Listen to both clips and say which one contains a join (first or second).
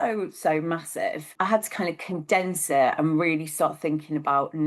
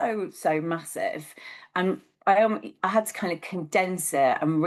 first